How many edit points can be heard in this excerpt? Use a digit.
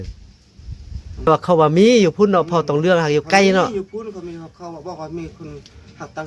1